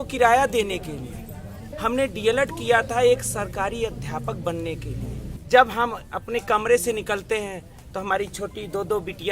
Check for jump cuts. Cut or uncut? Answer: cut